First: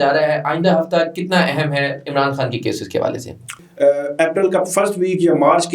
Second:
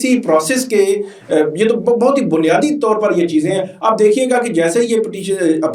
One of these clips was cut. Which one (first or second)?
first